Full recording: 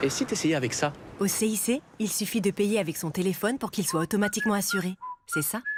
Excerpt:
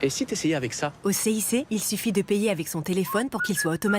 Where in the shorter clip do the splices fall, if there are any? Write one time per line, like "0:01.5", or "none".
0:01.0
0:01.7